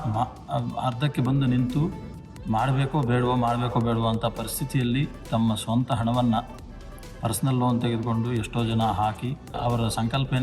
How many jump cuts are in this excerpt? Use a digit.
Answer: 1